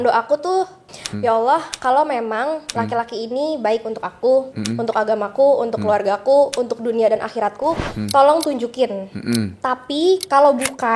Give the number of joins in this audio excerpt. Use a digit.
1